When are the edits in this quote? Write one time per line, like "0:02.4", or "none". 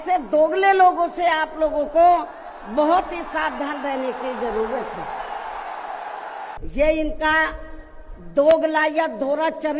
0:06.6